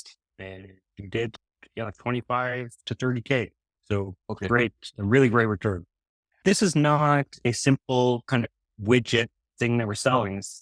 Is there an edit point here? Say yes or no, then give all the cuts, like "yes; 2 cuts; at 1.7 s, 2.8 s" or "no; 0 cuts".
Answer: yes; 1 cut; at 6.4 s